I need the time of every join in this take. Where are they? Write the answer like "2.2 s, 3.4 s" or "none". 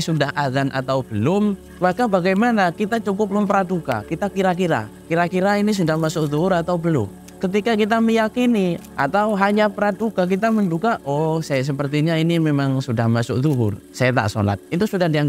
1.7 s, 7.2 s, 8.9 s, 13.8 s

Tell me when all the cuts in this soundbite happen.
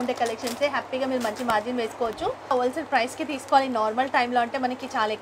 2.5 s

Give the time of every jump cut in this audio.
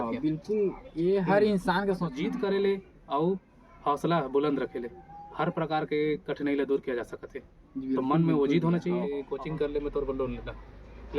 2.2 s, 9.2 s

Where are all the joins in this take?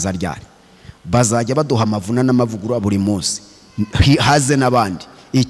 none

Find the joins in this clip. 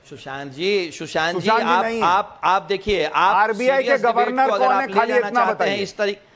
none

